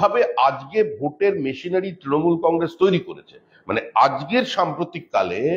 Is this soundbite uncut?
yes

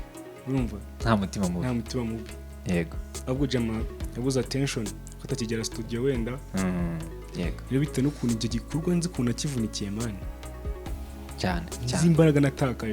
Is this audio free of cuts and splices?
no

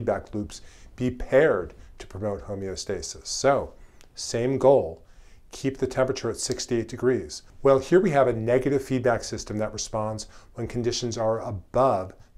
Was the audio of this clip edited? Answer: no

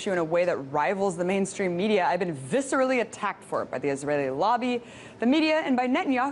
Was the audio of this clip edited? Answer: no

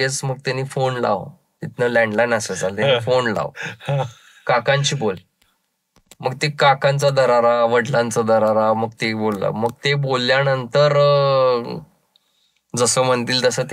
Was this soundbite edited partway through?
no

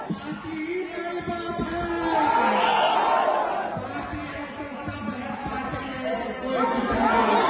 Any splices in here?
no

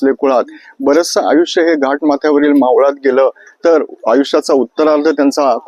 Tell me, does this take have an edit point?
no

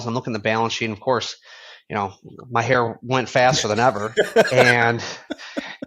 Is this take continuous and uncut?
yes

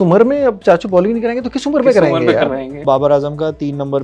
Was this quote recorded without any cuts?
no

